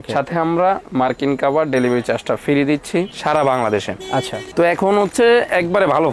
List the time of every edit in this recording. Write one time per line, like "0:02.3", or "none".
none

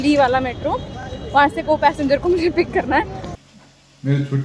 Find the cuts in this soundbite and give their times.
0:03.4

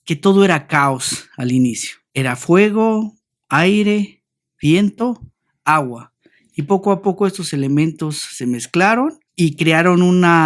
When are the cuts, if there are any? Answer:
none

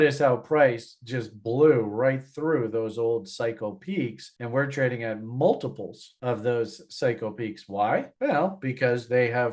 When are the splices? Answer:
none

